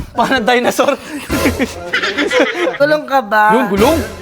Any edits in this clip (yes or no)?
yes